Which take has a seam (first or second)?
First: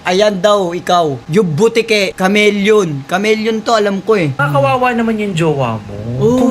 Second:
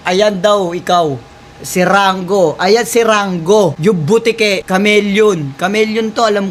first